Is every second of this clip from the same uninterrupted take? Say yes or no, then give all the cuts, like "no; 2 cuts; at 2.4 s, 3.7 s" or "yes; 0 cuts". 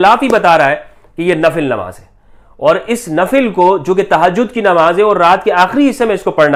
yes; 0 cuts